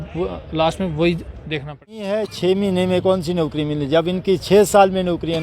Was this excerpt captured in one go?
no; 1 cut; at 2.3 s

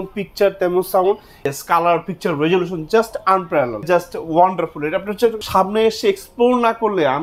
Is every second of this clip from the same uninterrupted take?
no; 3 cuts; at 1.4 s, 3.8 s, 5.4 s

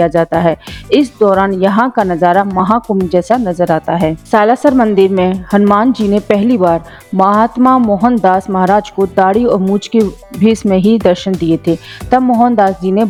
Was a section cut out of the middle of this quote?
no; 0 cuts

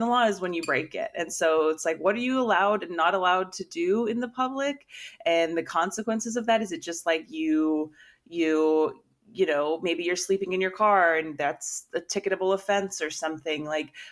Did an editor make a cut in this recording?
no; 0 cuts

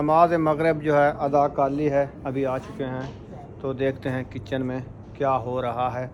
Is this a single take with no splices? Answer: yes; 0 cuts

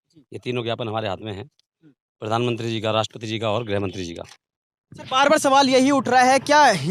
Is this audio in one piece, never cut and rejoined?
yes; 0 cuts

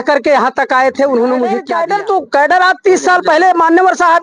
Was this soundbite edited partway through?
yes; 1 cut; at 1.7 s

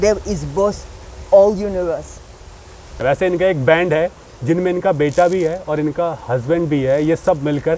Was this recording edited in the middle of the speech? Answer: yes; 1 cut; at 2.9 s

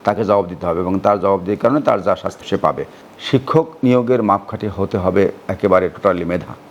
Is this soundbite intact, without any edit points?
no; 1 cut; at 2.6 s

